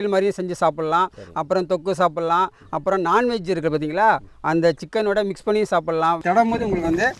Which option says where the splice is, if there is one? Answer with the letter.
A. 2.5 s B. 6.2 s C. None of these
B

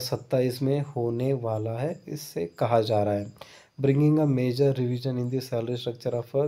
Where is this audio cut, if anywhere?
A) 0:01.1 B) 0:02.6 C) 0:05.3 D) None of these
C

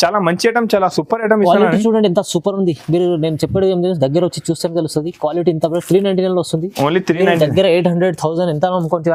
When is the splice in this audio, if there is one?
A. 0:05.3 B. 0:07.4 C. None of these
C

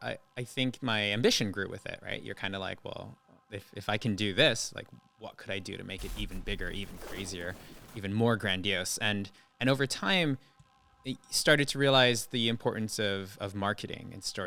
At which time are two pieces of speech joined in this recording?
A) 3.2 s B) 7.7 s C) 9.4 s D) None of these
D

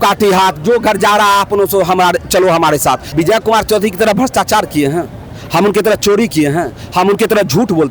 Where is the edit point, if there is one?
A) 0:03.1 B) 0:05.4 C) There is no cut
A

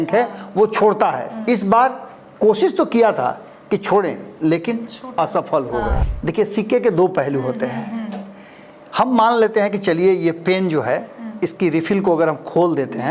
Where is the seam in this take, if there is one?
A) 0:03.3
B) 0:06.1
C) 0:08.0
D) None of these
B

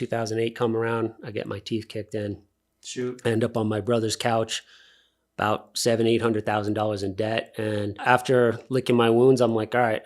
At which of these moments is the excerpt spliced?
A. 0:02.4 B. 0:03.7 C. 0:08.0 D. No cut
C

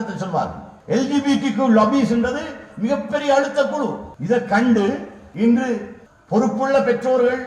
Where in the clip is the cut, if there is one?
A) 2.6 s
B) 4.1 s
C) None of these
B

